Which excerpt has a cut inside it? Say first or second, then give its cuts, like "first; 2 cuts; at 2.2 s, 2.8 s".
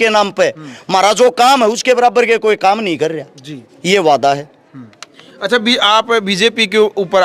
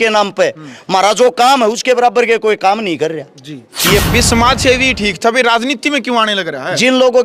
second; 1 cut; at 4.0 s